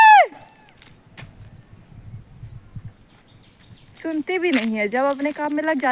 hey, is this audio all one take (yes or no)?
yes